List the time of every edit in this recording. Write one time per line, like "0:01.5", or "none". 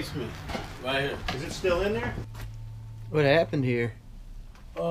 0:02.3